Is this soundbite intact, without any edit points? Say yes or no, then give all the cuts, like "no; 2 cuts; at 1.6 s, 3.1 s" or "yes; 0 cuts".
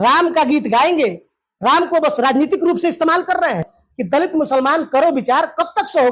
no; 1 cut; at 3.8 s